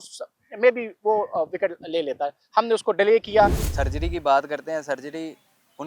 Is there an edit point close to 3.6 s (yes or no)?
yes